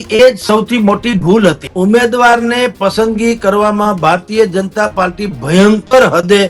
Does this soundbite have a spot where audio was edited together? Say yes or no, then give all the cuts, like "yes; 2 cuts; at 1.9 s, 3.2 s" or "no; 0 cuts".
yes; 1 cut; at 1.7 s